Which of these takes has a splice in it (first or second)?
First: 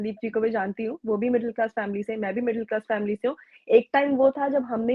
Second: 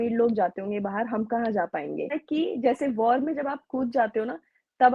second